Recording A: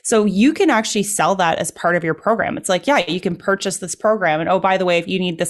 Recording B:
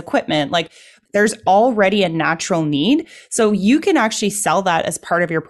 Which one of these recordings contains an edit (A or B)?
B